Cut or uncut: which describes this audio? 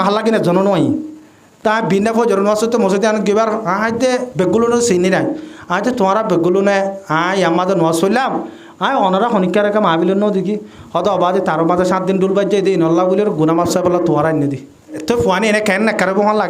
cut